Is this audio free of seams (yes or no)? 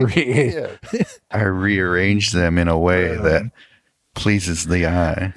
no